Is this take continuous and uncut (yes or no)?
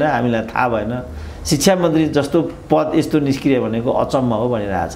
yes